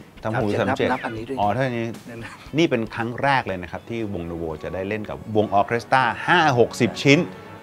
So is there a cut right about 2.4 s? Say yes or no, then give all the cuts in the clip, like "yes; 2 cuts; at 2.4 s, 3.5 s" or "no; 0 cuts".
yes; 1 cut; at 2.4 s